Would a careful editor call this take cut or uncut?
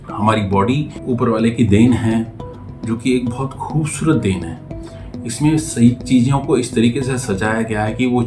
cut